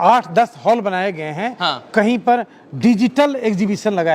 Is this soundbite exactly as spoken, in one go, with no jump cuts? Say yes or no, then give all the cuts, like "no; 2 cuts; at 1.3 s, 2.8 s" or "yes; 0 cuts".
yes; 0 cuts